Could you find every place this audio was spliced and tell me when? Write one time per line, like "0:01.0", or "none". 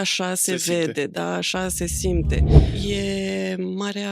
0:02.6